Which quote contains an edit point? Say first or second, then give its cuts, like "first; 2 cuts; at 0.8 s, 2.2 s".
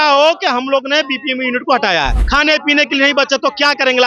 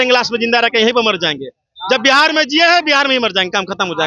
first; 1 cut; at 2.2 s